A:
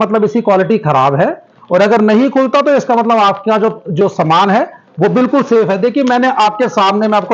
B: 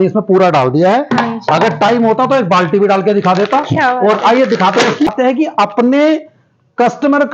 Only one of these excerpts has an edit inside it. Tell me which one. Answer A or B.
B